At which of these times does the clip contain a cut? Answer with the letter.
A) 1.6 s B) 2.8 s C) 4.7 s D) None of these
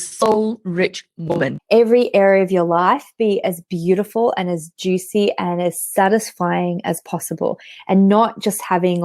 A